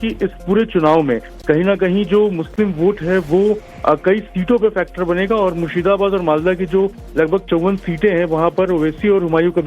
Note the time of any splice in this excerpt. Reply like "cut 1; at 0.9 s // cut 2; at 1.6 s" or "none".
cut 1; at 1.8 s